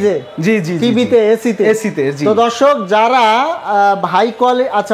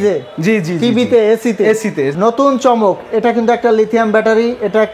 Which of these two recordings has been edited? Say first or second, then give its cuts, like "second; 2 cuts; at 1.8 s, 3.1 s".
second; 1 cut; at 2.1 s